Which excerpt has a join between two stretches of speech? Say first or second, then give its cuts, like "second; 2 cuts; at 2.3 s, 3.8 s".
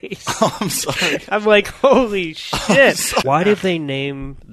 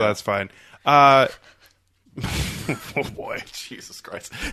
first; 1 cut; at 3.2 s